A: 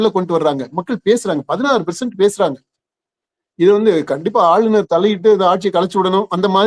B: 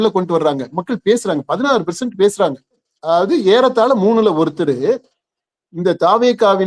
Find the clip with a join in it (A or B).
B